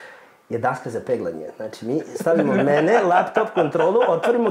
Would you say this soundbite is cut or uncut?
uncut